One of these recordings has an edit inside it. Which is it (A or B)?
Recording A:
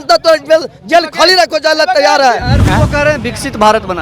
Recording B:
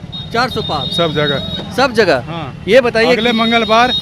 A